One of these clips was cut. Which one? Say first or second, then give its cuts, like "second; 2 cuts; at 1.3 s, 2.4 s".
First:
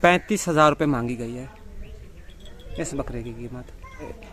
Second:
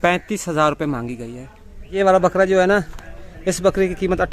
second; 1 cut; at 2.0 s